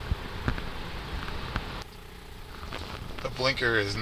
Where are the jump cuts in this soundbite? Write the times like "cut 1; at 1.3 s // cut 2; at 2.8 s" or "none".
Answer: cut 1; at 1.8 s